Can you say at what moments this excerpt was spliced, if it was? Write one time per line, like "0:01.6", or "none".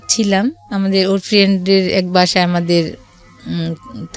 none